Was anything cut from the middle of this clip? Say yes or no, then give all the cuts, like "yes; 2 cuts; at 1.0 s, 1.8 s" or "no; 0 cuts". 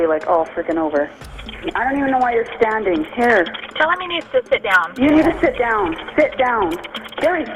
yes; 1 cut; at 1.1 s